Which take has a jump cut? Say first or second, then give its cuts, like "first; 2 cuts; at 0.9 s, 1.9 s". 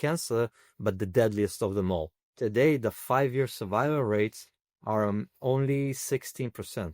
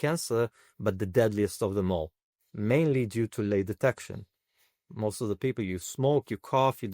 first; 1 cut; at 2.3 s